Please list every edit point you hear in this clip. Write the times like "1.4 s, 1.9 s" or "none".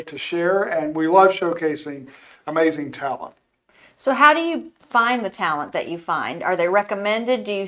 none